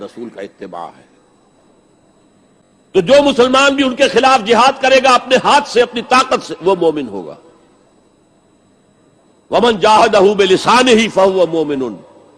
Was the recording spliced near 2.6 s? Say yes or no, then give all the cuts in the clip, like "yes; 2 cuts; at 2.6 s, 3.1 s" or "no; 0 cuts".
yes; 1 cut; at 2.6 s